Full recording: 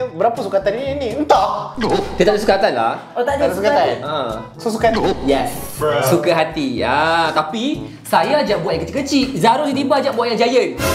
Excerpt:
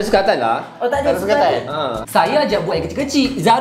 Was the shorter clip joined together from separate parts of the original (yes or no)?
yes